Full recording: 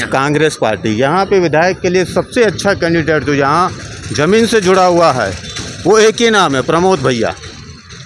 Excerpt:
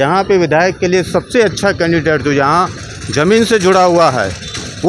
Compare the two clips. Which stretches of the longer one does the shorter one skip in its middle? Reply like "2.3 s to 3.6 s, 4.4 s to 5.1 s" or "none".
none